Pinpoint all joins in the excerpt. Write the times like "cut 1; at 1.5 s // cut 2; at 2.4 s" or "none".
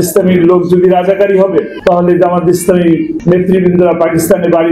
cut 1; at 1.7 s // cut 2; at 3.2 s